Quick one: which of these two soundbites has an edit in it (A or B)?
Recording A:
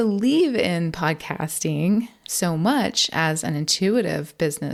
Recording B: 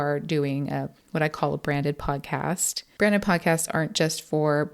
B